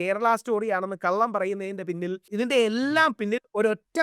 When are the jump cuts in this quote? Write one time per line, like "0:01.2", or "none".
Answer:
0:02.2